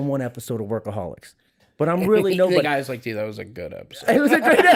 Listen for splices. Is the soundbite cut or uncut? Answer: uncut